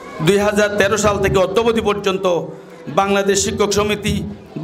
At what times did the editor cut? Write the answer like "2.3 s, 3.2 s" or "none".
none